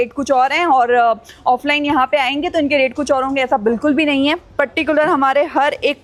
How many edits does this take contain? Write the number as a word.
zero